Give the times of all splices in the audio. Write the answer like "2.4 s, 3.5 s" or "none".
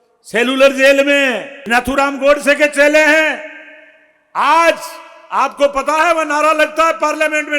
1.6 s